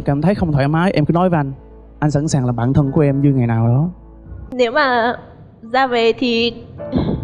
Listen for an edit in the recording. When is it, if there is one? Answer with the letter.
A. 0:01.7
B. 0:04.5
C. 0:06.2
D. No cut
D